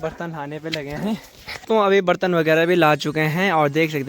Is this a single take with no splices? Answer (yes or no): no